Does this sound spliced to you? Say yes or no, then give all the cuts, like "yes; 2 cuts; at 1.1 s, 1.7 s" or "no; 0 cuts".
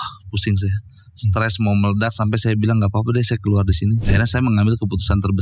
yes; 1 cut; at 4.0 s